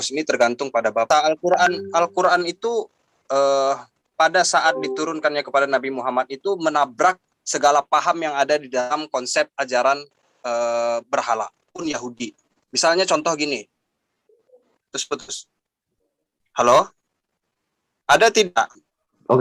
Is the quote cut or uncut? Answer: uncut